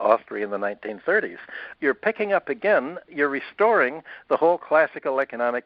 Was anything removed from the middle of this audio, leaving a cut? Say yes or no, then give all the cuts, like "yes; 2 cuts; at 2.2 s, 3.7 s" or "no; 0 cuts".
yes; 2 cuts; at 1.6 s, 3.0 s